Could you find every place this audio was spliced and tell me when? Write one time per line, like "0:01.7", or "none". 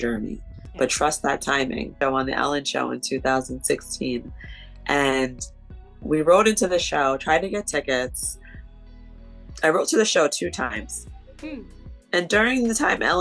0:01.9